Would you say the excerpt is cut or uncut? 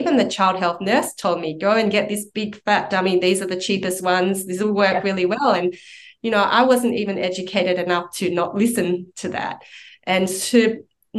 uncut